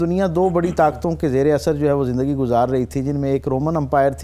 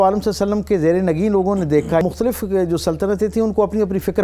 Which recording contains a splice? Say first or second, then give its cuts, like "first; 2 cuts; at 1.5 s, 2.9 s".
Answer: second; 1 cut; at 2.0 s